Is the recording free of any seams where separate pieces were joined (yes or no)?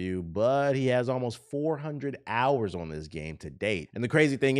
yes